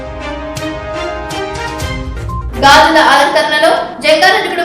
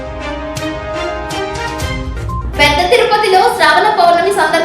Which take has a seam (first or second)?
second